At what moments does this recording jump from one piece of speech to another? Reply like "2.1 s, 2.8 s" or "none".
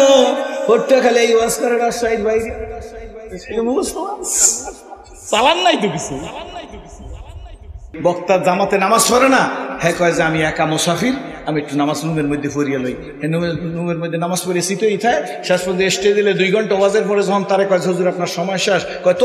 7.9 s